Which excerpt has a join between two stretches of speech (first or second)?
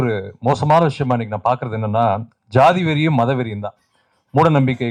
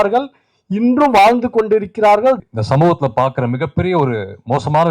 second